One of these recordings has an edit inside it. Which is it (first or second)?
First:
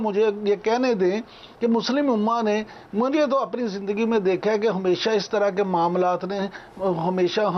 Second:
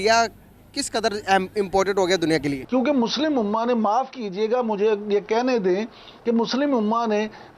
second